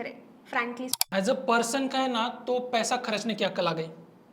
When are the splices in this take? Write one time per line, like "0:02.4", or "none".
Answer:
0:01.0

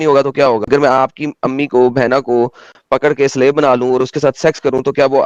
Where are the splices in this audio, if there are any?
none

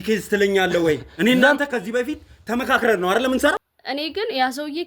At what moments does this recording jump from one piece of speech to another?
0:03.7

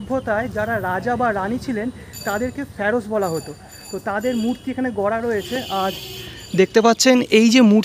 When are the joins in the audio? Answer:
none

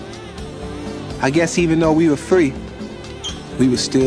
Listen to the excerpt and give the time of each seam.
none

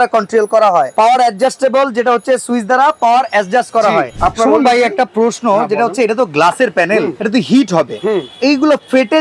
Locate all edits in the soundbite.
0:04.1
0:07.2

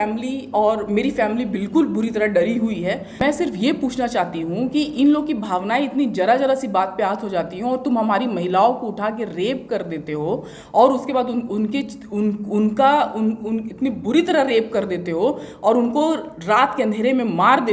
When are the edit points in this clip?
0:03.2

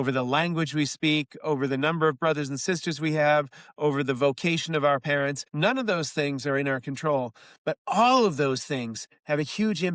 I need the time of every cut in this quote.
0:05.4

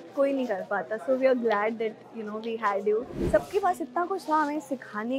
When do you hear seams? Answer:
0:03.2

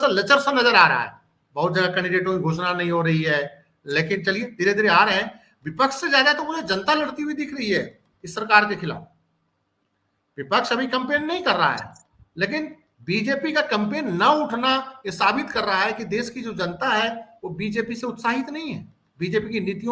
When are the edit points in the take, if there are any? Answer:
none

